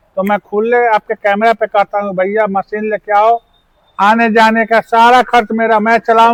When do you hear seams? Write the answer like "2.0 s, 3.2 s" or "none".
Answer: none